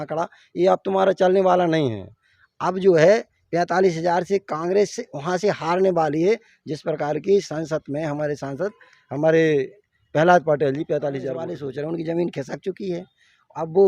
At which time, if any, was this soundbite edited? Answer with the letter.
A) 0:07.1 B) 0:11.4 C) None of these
B